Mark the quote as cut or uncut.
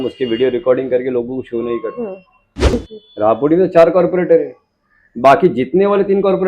cut